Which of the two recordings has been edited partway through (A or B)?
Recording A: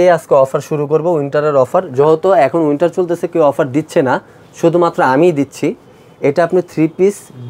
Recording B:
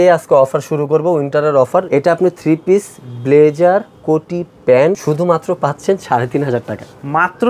B